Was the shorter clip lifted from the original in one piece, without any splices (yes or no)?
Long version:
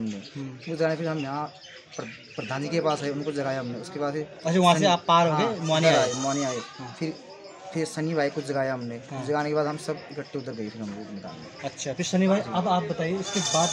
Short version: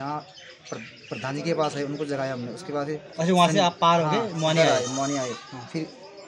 yes